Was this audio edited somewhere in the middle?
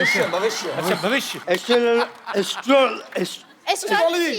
yes; 1 cut; at 1.5 s

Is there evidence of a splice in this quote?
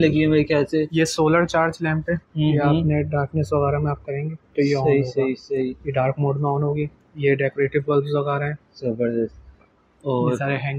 no; 0 cuts

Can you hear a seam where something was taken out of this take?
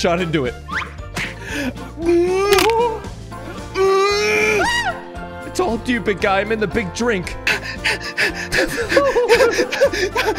no; 0 cuts

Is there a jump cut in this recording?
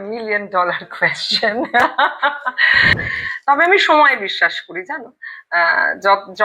yes; 1 cut; at 3.2 s

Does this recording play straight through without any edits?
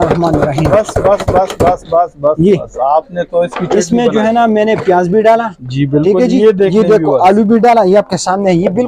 yes; 0 cuts

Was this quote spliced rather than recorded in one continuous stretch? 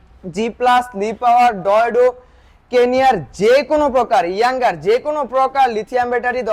no; 0 cuts

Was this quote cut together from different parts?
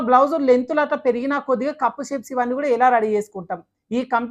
no; 0 cuts

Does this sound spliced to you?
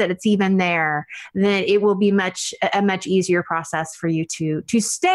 no; 0 cuts

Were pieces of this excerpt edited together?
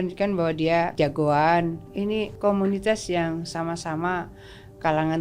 yes; 2 cuts; at 0.9 s, 2.3 s

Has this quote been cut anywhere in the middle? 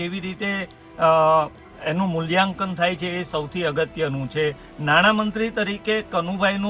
no; 0 cuts

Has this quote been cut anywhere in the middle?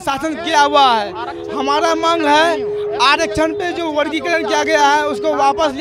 no; 0 cuts

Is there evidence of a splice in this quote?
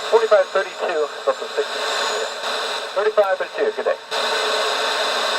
yes; 1 cut; at 2.8 s

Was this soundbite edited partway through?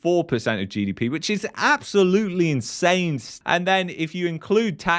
yes; 1 cut; at 3.4 s

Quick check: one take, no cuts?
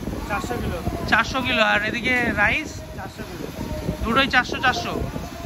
yes; 0 cuts

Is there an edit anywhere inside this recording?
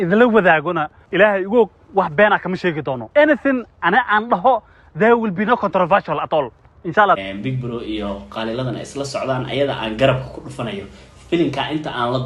no; 0 cuts

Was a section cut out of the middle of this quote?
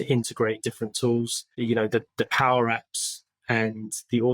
yes; 1 cut; at 1.6 s

